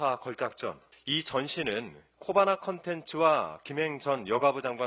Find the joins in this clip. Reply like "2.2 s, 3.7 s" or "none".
0.9 s